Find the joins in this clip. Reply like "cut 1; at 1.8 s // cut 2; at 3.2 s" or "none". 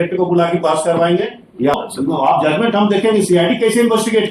cut 1; at 1.8 s